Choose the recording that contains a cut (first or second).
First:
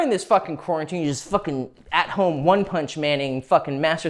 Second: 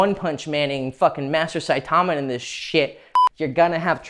second